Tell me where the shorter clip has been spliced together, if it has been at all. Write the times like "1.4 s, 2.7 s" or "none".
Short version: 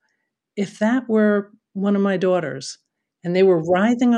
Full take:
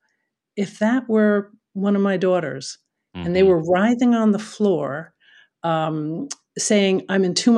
none